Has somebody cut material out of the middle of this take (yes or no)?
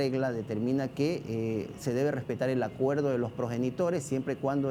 no